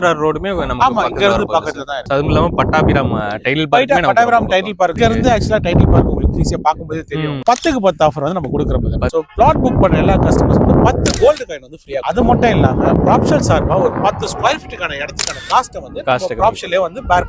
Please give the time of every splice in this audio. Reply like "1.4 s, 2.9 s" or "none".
4.9 s, 7.4 s, 9.1 s